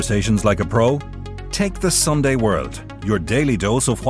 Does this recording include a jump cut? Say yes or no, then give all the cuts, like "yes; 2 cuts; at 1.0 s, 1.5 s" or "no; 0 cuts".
no; 0 cuts